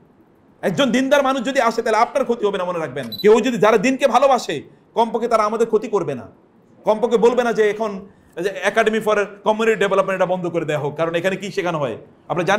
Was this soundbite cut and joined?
yes; 1 cut; at 3.0 s

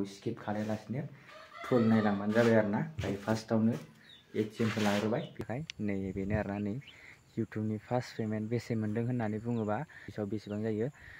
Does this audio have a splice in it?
yes; 2 cuts; at 5.4 s, 10.0 s

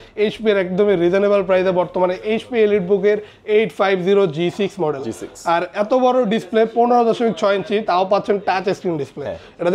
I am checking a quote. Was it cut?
no; 0 cuts

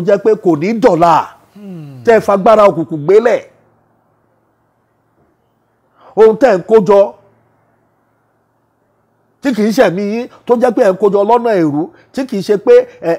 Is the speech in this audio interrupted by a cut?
no; 0 cuts

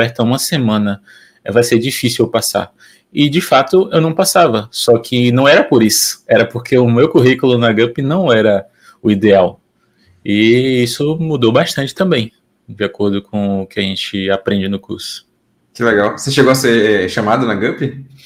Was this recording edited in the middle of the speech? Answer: no; 0 cuts

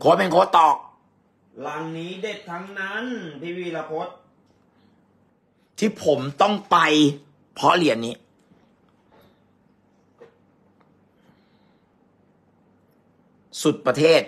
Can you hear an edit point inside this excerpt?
yes; 2 cuts; at 5.3 s, 11.9 s

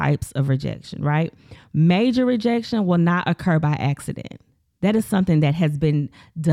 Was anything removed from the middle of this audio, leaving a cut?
no; 0 cuts

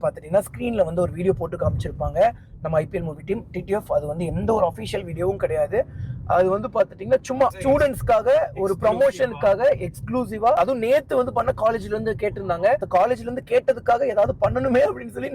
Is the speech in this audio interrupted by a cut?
yes; 2 cuts; at 7.6 s, 10.6 s

